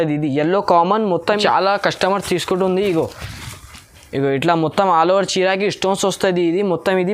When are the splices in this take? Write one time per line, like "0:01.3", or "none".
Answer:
0:01.3